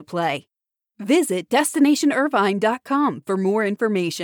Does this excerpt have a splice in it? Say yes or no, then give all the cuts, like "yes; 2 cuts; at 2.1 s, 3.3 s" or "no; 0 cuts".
no; 0 cuts